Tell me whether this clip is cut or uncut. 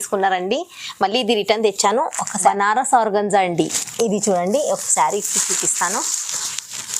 cut